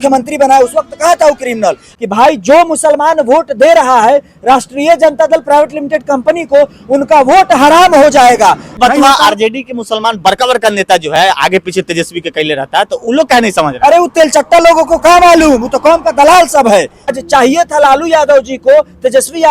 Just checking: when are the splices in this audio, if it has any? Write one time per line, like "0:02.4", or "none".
0:01.9
0:08.7
0:17.2